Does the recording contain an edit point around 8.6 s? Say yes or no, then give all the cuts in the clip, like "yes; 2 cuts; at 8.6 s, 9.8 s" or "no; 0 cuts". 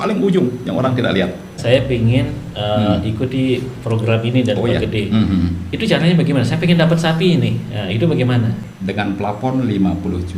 yes; 2 cuts; at 1.6 s, 8.6 s